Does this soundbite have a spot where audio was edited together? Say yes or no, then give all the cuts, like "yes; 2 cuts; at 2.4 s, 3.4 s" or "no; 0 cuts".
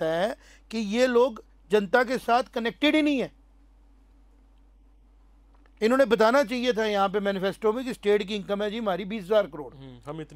no; 0 cuts